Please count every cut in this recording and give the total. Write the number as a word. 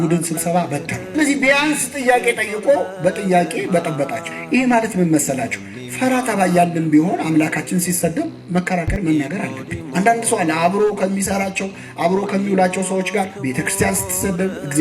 one